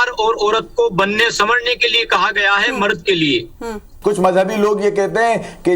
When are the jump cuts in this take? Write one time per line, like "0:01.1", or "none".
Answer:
0:03.9